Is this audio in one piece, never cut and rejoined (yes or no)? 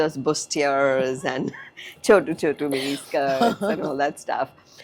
yes